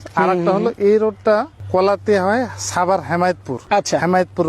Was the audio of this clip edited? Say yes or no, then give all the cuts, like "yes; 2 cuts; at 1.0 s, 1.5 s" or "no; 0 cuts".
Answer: yes; 2 cuts; at 1.6 s, 3.5 s